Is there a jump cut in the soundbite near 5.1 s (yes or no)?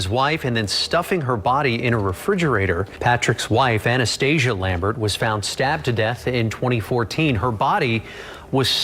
no